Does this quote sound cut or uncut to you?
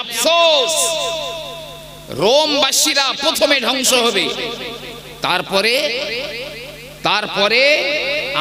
uncut